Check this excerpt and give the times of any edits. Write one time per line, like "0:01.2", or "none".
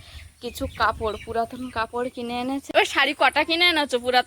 0:02.6

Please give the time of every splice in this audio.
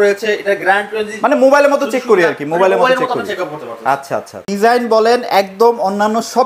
0:04.4

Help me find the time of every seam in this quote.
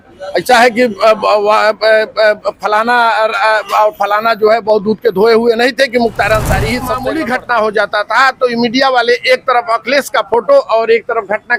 0:07.0

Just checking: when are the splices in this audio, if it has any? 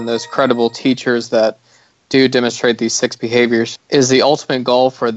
0:03.8

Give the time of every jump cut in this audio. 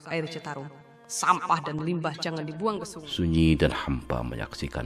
0:03.0

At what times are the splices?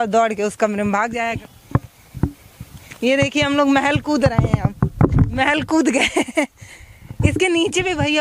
0:01.4

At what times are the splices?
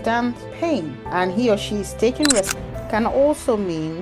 0:02.7

